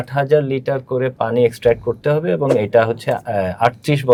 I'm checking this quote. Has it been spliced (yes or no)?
no